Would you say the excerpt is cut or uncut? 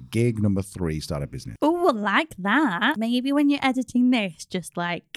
cut